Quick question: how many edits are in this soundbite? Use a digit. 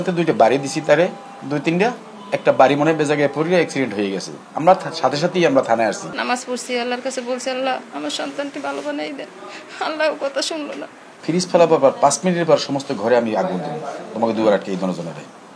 2